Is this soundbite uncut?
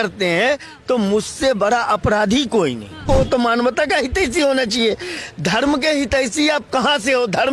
no; 1 cut; at 3.0 s

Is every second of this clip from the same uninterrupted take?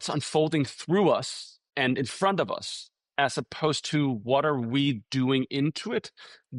no; 1 cut; at 1.7 s

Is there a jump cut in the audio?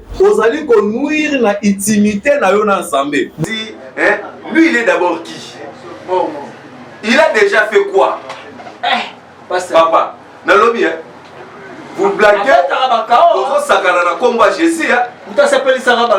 yes; 1 cut; at 3.4 s

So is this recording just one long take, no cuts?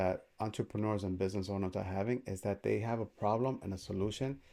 yes; 0 cuts

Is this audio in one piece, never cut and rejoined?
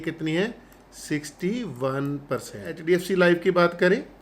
no; 1 cut; at 2.7 s

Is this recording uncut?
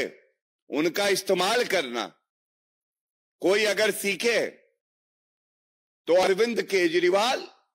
yes; 0 cuts

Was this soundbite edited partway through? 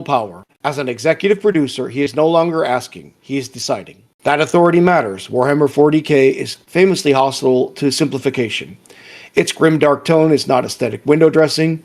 no; 0 cuts

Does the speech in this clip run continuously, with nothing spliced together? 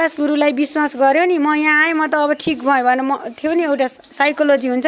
yes; 0 cuts

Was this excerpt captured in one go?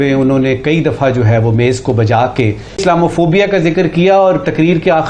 no; 1 cut; at 2.8 s

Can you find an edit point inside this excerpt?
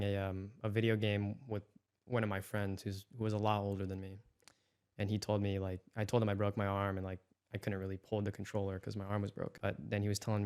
yes; 1 cut; at 9.5 s

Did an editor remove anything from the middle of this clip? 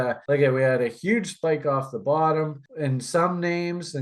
no; 0 cuts

